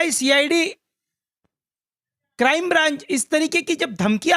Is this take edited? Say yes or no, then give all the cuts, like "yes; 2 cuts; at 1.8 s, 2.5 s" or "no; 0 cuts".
no; 0 cuts